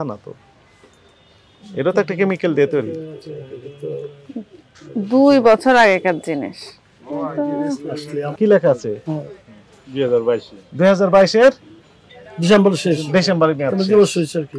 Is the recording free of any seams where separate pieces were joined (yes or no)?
no